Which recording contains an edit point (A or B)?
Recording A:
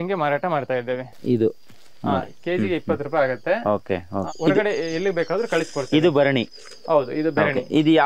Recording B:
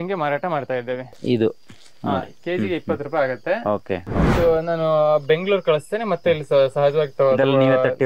B